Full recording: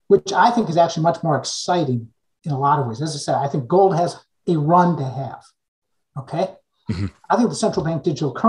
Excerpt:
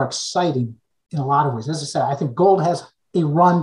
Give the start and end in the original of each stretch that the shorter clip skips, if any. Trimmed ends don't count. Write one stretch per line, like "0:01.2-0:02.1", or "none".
none